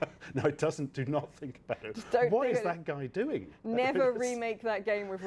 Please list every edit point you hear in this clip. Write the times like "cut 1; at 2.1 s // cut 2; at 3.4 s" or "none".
none